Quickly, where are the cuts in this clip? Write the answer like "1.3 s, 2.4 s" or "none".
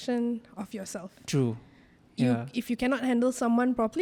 none